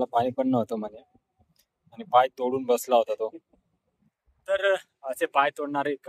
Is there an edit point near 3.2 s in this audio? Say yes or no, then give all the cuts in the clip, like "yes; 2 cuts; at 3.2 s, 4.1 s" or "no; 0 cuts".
no; 0 cuts